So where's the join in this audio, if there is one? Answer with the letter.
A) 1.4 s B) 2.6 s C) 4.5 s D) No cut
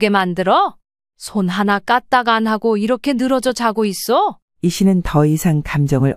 C